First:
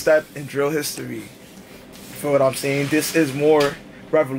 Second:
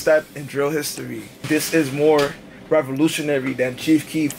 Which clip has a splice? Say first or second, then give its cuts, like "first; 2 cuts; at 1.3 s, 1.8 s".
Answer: second; 1 cut; at 1.4 s